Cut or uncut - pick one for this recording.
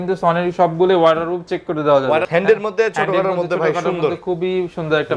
cut